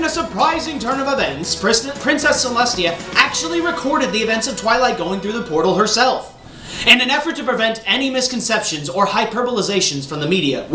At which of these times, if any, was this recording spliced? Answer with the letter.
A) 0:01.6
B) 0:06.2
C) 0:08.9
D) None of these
A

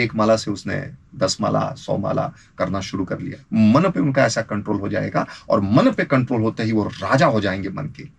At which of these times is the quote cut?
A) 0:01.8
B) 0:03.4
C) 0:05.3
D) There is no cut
B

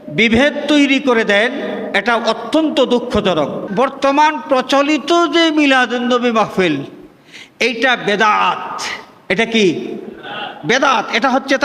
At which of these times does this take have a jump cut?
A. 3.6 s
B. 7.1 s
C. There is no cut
A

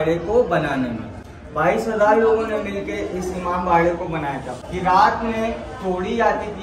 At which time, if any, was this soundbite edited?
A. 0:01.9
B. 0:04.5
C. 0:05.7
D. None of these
B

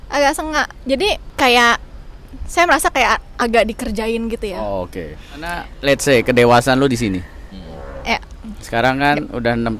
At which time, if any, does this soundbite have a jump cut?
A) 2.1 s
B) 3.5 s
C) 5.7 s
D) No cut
C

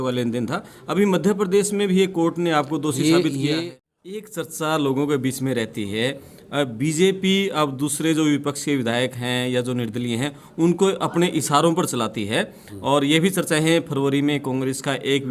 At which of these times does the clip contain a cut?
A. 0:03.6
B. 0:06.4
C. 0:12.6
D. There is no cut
A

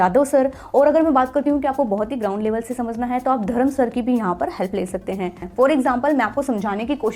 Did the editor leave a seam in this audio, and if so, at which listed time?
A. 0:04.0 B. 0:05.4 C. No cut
B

